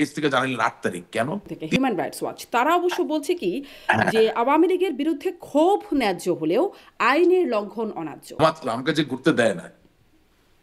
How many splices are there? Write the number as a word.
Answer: two